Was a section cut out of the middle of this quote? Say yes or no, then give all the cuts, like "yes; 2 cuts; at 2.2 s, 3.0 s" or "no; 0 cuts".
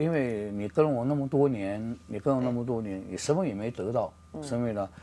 no; 0 cuts